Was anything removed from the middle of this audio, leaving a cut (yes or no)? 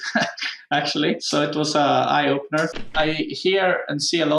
yes